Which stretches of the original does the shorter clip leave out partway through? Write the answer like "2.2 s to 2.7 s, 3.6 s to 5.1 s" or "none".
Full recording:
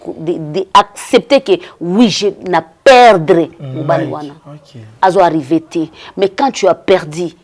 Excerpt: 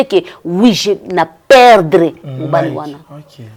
none